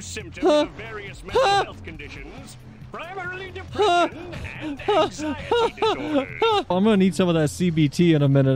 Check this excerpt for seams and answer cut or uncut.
cut